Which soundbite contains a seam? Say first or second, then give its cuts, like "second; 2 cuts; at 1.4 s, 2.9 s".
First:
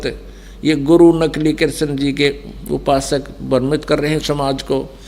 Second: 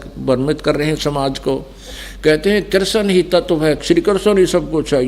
second; 1 cut; at 3.8 s